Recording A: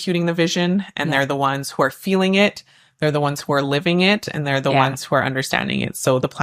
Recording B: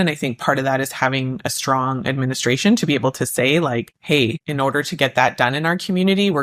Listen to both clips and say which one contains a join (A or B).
B